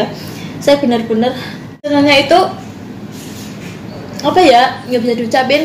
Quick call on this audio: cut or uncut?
cut